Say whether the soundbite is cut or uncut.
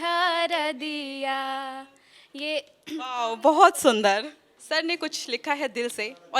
cut